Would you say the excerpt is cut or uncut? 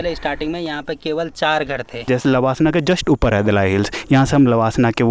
cut